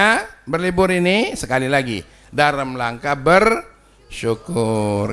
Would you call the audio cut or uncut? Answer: uncut